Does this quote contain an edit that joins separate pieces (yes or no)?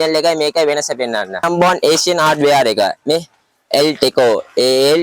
yes